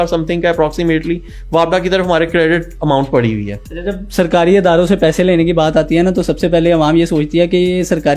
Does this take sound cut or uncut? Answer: uncut